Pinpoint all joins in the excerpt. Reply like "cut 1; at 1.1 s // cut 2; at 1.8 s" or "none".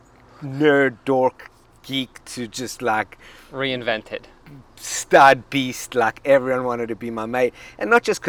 none